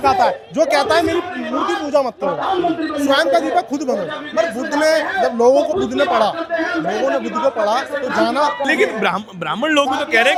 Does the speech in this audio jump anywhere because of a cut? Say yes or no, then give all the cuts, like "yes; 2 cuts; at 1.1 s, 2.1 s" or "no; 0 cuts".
no; 0 cuts